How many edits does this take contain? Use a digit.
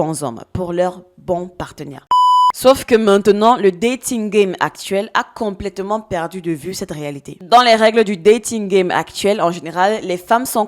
1